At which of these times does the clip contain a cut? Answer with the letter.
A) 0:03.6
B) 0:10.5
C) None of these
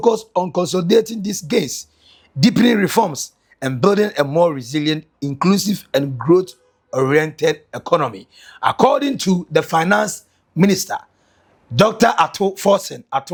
C